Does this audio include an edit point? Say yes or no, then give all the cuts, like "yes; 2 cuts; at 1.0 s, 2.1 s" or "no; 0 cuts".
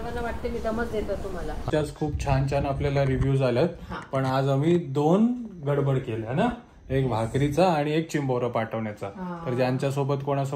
yes; 1 cut; at 1.7 s